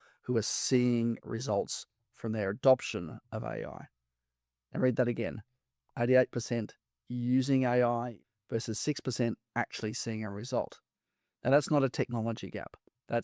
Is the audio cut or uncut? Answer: cut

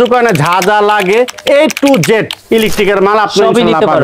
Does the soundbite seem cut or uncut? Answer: uncut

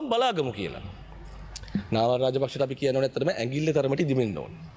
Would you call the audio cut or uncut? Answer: uncut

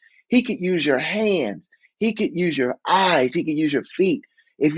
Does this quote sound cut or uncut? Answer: uncut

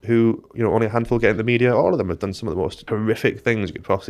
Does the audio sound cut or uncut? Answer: cut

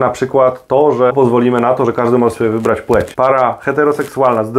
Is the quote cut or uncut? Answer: cut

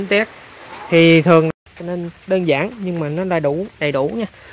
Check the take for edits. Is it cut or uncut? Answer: cut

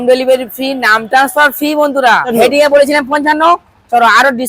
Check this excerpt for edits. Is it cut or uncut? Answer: cut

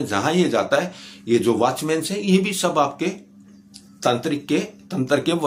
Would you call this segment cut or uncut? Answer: uncut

